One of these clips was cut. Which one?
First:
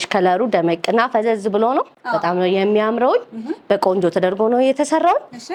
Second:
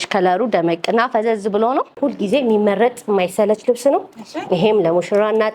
second; 1 cut; at 2.0 s

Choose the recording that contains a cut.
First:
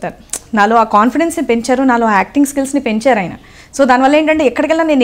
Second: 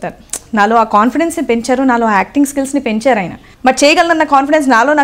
second; 1 cut; at 3.4 s

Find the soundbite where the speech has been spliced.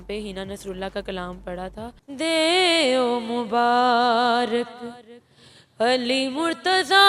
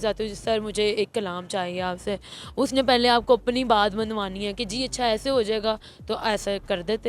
first; 1 cut; at 2.0 s

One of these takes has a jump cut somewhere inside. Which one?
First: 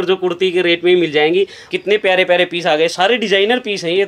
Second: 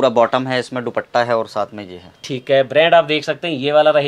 first; 1 cut; at 1.6 s

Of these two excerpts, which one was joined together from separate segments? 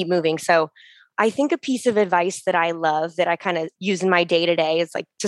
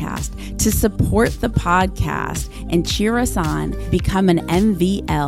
first; 1 cut; at 3.7 s

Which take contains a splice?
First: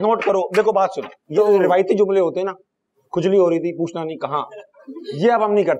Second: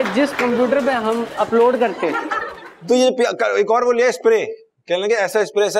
second; 1 cut; at 2.7 s

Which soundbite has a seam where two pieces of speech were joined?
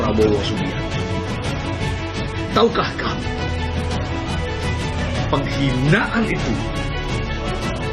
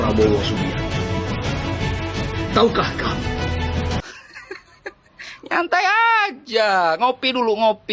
second; 1 cut; at 4.0 s

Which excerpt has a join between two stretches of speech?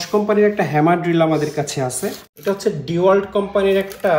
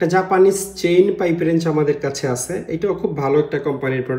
first; 1 cut; at 2.3 s

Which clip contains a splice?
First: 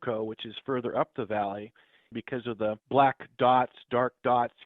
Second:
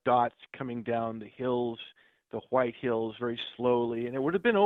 first; 1 cut; at 2.2 s

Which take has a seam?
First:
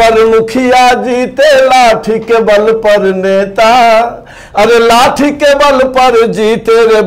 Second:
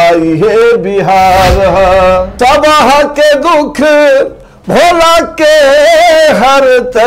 second; 1 cut; at 2.3 s

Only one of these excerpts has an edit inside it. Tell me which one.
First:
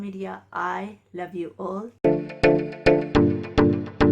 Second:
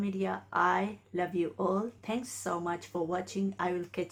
first; 1 cut; at 2.0 s

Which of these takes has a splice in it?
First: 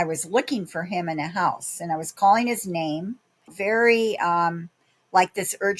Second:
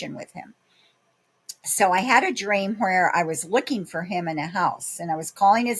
first; 1 cut; at 3.5 s

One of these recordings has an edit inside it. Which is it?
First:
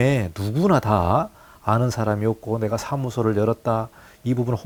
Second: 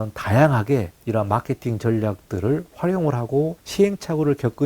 second; 2 cuts; at 1.0 s, 3.6 s

